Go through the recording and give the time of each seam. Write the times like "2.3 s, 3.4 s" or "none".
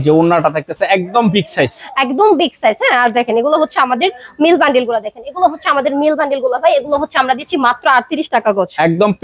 none